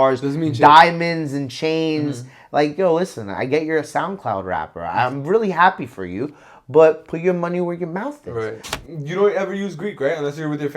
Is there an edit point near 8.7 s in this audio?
yes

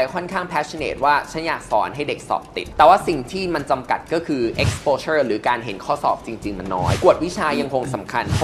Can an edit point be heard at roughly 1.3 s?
no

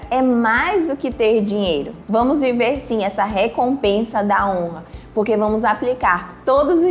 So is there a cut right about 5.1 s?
no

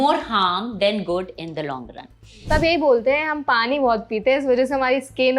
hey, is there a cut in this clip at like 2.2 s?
yes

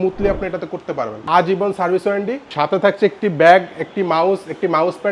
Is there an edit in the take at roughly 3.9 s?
no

